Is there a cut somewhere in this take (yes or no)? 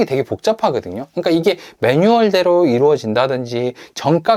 no